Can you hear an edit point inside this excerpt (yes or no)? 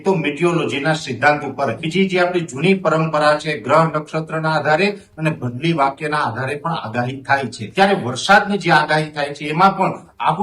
yes